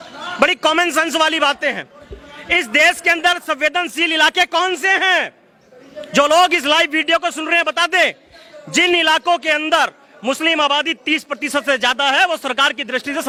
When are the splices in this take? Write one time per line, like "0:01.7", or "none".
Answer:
none